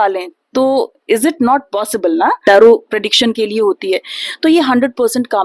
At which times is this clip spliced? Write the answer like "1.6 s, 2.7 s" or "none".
2.4 s